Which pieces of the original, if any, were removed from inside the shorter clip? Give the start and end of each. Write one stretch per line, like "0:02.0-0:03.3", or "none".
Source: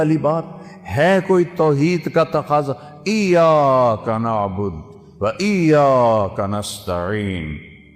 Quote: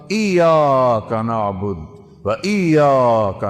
none